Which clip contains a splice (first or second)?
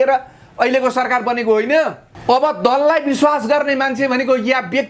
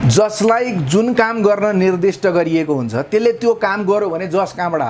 first